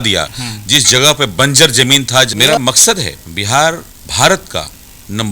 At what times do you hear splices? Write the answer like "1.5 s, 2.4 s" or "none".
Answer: 2.3 s